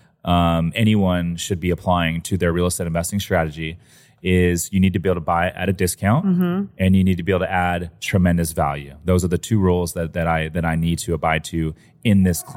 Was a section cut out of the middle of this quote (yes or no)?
no